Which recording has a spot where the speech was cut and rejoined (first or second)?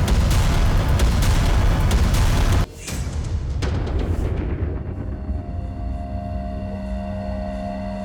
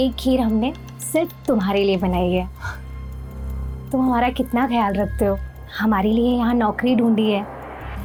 first